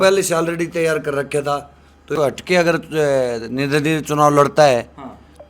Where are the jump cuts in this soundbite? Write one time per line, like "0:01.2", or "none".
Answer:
0:02.1